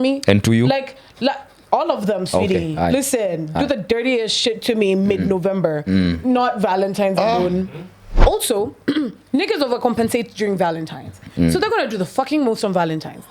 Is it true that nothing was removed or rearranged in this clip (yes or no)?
no